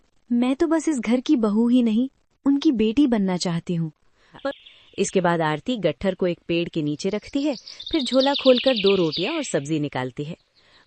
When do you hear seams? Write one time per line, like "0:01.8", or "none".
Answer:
0:04.3